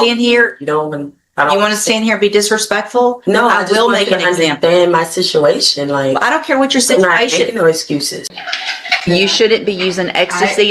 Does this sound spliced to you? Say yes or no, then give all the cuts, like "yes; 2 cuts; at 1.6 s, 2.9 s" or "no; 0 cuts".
yes; 1 cut; at 8.3 s